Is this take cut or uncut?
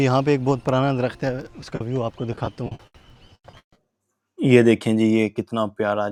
uncut